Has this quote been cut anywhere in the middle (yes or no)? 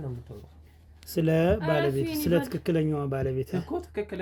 no